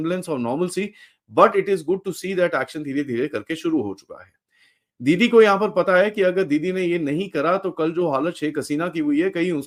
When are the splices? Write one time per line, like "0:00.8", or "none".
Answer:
none